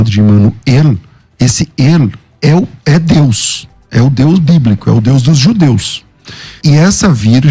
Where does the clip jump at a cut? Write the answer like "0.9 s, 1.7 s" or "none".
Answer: 6.6 s